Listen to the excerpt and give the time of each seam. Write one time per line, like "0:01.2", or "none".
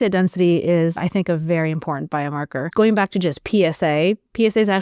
0:01.0
0:02.7